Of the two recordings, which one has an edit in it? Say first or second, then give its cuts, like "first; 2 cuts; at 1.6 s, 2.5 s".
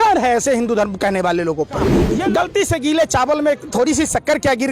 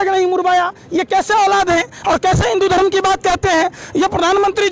first; 1 cut; at 2.0 s